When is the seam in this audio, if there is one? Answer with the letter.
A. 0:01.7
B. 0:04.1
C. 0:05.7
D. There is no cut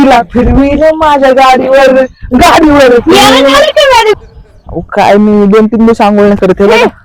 B